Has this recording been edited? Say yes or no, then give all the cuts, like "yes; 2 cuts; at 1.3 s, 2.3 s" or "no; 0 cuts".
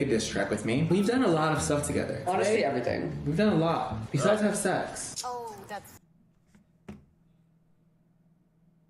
no; 0 cuts